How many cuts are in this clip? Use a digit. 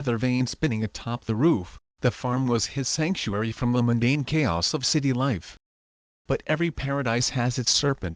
3